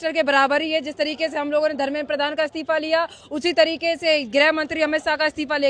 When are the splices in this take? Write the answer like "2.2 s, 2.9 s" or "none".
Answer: none

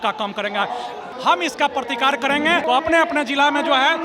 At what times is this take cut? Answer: 1.1 s, 2.6 s

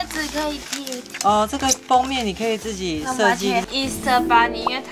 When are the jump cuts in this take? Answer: 3.7 s

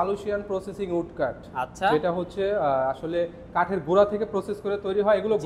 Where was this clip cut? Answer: none

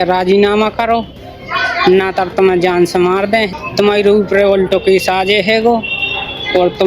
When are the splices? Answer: 3.5 s

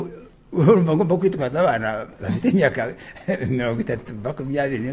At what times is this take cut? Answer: none

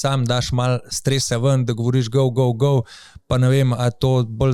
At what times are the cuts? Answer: none

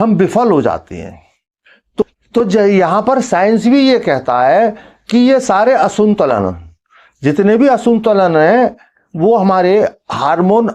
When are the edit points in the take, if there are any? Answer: none

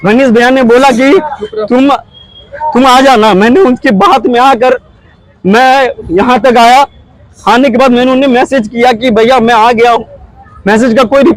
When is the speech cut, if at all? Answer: none

